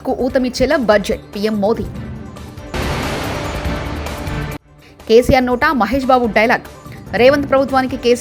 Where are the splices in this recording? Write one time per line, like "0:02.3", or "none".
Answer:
none